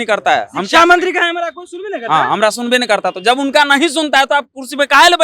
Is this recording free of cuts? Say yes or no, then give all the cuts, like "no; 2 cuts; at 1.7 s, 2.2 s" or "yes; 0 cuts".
yes; 0 cuts